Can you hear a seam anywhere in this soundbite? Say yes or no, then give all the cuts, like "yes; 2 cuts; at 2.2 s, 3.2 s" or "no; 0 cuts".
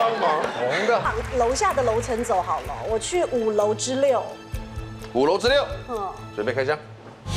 yes; 1 cut; at 1.1 s